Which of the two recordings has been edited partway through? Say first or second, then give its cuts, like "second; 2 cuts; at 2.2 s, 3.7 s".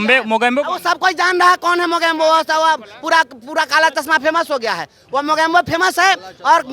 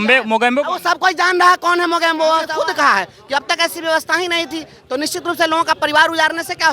second; 1 cut; at 2.5 s